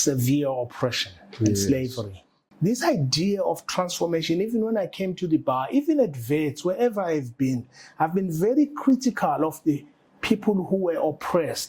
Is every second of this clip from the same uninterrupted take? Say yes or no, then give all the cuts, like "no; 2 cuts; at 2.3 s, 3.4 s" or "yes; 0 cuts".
no; 1 cut; at 2.4 s